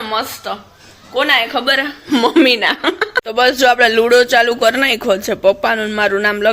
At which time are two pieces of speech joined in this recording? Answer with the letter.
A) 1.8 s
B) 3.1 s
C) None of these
B